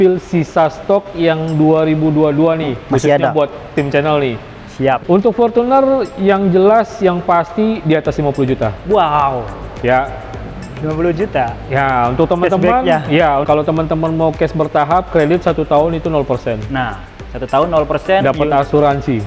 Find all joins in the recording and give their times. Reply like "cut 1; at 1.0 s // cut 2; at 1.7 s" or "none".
cut 1; at 5.0 s // cut 2; at 13.4 s